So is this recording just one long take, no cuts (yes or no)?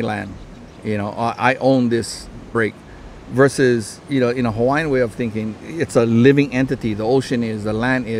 no